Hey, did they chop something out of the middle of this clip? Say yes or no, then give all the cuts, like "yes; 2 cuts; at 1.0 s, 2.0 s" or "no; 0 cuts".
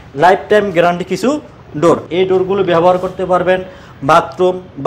yes; 1 cut; at 2.1 s